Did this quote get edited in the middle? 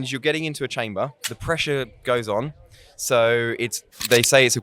yes; 1 cut; at 1.3 s

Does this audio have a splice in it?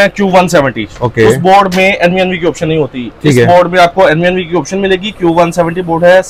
no; 0 cuts

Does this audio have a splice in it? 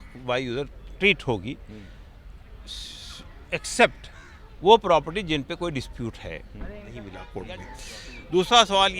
yes; 1 cut; at 7.2 s

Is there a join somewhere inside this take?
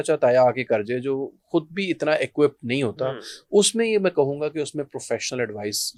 no; 0 cuts

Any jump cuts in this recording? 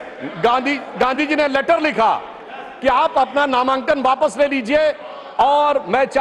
no; 0 cuts

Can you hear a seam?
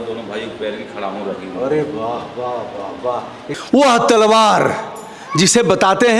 yes; 1 cut; at 3.4 s

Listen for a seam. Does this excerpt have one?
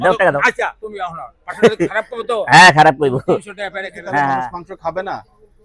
yes; 1 cut; at 4.6 s

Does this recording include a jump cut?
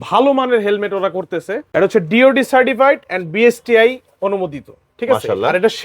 yes; 1 cut; at 1.6 s

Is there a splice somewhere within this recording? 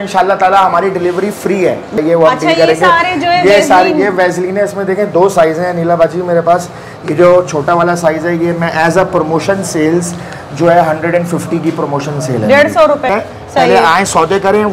yes; 2 cuts; at 2.0 s, 13.1 s

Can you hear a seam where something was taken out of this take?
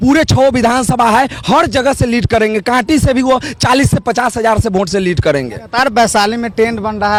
no; 0 cuts

